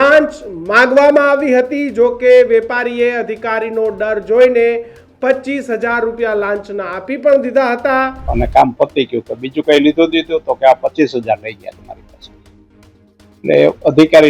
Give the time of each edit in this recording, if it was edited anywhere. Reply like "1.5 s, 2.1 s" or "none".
8.2 s